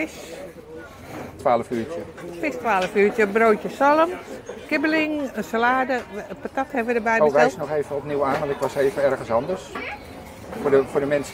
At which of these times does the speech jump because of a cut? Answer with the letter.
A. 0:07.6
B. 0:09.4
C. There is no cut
C